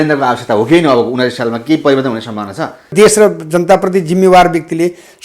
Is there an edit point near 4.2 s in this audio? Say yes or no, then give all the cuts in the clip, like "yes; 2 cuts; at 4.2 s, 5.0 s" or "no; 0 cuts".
no; 1 cut; at 2.9 s